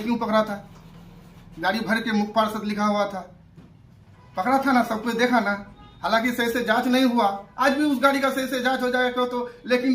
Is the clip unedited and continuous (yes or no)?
yes